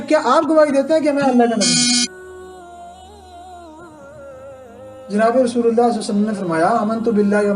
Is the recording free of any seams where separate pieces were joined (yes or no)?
yes